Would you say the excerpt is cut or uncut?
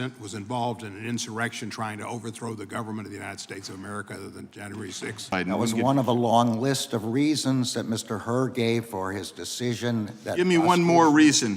cut